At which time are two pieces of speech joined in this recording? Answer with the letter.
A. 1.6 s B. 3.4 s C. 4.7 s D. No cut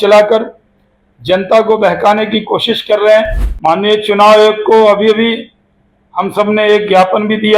B